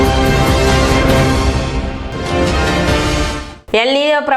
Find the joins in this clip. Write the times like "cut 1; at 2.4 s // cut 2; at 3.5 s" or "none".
cut 1; at 1.5 s // cut 2; at 3.2 s